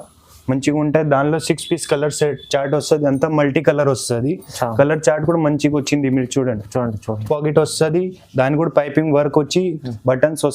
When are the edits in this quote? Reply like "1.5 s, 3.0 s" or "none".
7.2 s